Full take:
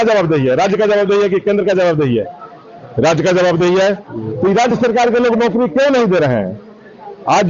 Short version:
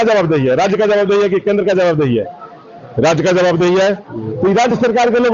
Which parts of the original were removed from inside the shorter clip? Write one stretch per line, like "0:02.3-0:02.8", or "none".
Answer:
none